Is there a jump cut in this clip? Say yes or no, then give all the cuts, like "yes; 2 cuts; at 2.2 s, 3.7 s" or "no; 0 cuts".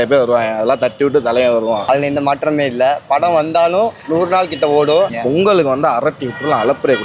yes; 2 cuts; at 1.9 s, 5.1 s